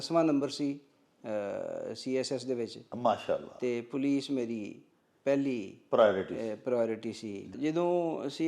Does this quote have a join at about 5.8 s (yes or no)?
no